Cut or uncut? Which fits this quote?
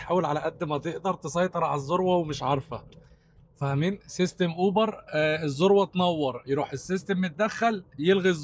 uncut